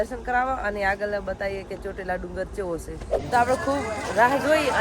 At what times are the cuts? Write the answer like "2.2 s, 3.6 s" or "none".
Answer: 3.2 s